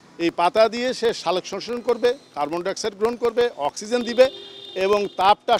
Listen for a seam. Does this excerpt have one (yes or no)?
no